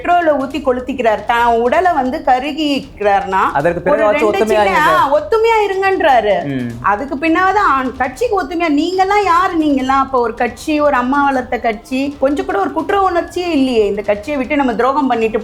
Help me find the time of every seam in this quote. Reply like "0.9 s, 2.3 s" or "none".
12.2 s